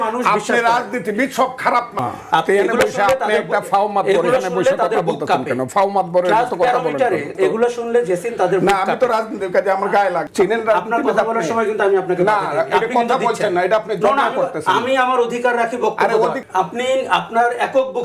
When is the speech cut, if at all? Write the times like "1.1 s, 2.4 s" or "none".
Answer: 1.9 s, 7.3 s, 10.3 s, 16.4 s